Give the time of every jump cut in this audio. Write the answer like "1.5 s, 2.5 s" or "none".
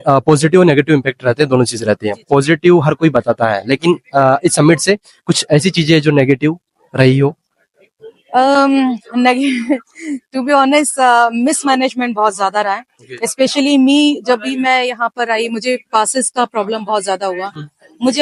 none

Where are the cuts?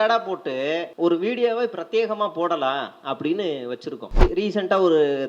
0.9 s, 4.2 s

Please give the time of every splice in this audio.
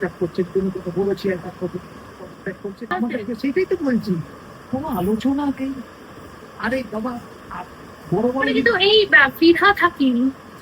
2.9 s

